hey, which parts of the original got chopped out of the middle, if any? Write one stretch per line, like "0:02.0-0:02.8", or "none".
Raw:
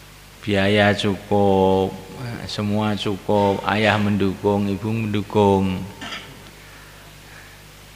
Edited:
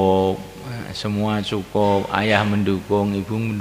none